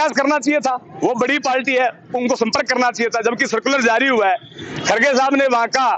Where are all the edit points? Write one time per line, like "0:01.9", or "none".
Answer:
none